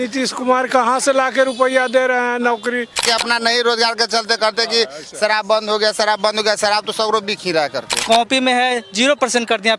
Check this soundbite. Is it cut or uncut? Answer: cut